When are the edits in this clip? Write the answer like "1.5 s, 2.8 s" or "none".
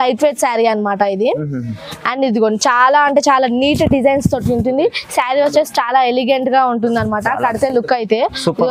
none